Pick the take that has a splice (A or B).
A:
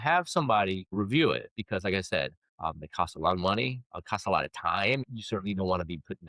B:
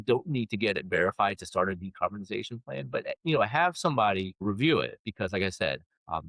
A